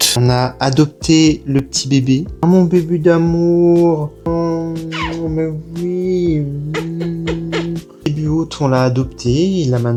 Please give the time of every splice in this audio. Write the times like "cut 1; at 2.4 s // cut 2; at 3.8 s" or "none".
none